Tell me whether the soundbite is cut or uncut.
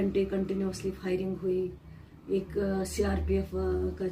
uncut